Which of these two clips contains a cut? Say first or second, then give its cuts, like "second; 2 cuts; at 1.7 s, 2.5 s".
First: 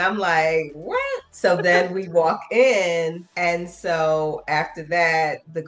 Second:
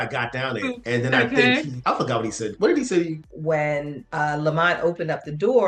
second; 3 cuts; at 0.8 s, 1.7 s, 3.3 s